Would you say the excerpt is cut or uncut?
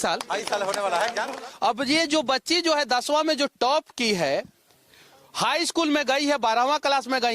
cut